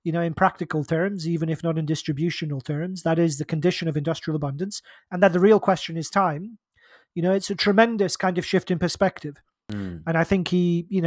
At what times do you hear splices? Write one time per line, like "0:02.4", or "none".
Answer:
none